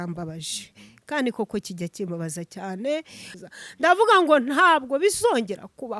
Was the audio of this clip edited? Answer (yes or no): yes